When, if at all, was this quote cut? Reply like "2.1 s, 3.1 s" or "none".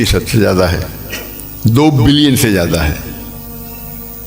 none